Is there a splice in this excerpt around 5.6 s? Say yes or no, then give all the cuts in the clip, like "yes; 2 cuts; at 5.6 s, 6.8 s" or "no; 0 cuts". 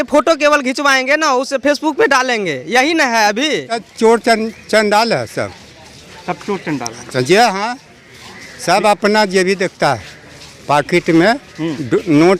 no; 1 cut; at 3.8 s